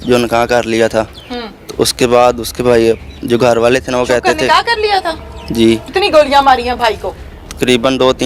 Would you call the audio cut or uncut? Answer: cut